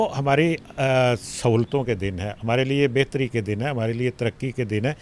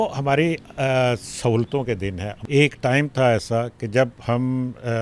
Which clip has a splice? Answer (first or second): second